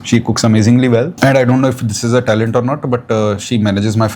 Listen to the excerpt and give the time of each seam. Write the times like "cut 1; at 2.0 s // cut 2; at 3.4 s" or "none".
cut 1; at 1.1 s